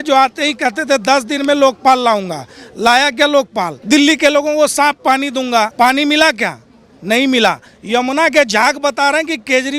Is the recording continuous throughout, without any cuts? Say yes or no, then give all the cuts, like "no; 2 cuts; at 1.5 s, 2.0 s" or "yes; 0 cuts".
no; 2 cuts; at 3.7 s, 5.7 s